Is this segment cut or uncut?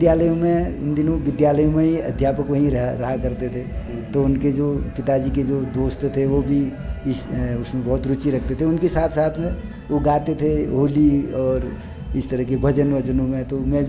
uncut